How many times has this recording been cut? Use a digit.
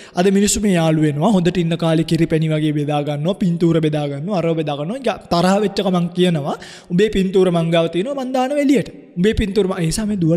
1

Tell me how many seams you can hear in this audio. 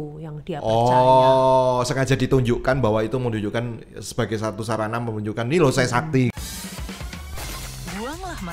1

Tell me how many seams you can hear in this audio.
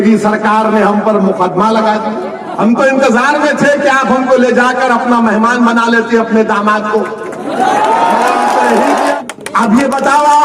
2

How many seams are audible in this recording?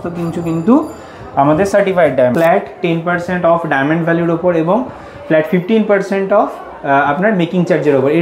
1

